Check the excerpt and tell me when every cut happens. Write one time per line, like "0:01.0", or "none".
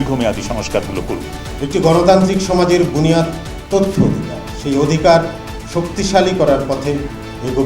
0:01.5